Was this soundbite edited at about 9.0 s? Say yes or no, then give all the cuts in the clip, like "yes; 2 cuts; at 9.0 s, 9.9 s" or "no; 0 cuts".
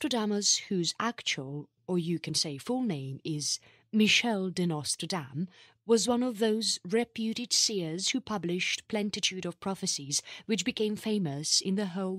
yes; 1 cut; at 9.0 s